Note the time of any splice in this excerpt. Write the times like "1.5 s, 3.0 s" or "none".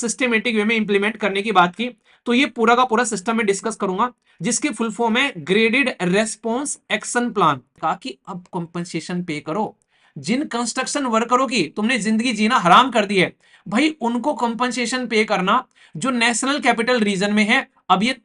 7.7 s

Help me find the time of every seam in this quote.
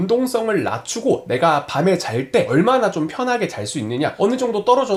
none

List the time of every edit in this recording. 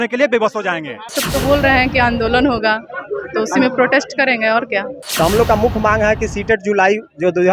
1.2 s, 5.0 s

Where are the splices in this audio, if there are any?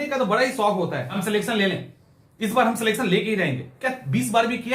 1.2 s

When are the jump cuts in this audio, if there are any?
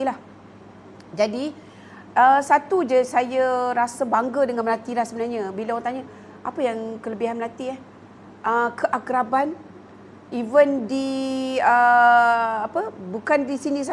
none

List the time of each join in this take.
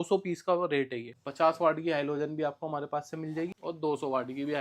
1.1 s, 3.5 s

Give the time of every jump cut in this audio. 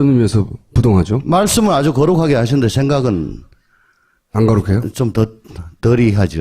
3.1 s

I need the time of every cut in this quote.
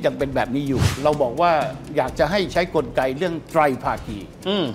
0.9 s

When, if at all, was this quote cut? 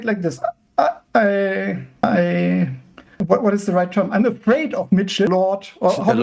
5.3 s

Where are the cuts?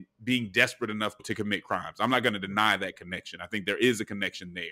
1.3 s

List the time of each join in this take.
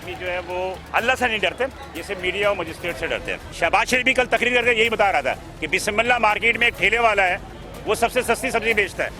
0.8 s, 1.9 s, 3.5 s

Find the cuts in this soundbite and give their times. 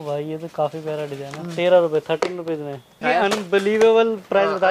3.0 s

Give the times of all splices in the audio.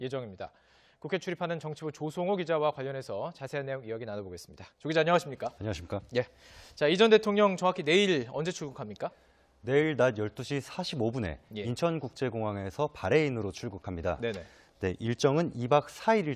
none

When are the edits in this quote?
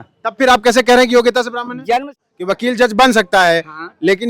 2.1 s

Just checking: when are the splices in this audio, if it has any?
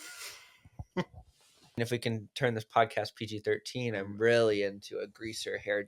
1.8 s, 4.1 s

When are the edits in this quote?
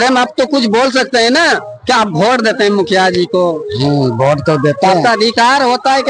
none

